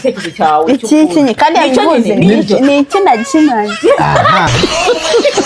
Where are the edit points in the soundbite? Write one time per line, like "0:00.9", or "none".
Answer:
0:04.5